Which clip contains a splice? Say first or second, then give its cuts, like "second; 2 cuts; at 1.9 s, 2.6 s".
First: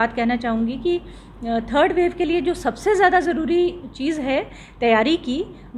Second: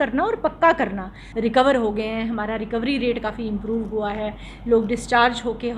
second; 1 cut; at 1.2 s